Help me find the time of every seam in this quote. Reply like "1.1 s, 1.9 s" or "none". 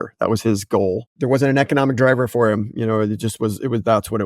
1.1 s